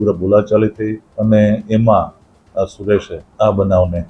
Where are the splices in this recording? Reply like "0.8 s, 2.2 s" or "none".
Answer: 1.0 s, 3.2 s